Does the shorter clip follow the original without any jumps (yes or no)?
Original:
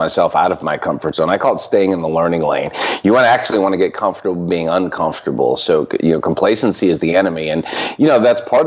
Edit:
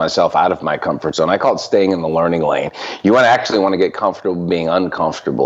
yes